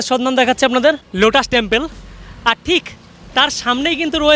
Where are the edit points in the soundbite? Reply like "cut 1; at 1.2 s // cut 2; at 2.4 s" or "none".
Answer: cut 1; at 1.1 s